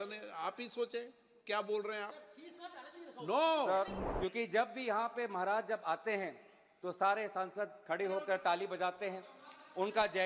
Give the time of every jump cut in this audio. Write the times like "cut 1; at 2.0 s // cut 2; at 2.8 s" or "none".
cut 1; at 4.0 s